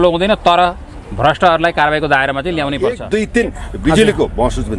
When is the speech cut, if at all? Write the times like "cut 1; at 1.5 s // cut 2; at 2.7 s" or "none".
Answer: cut 1; at 3.0 s